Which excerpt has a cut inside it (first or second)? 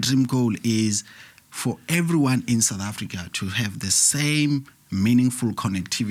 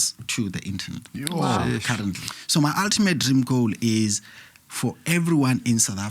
second